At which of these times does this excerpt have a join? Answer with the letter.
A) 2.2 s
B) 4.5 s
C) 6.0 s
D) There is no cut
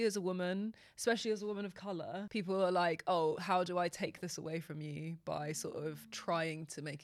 A